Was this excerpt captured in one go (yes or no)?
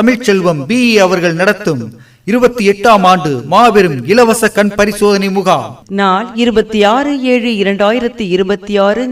yes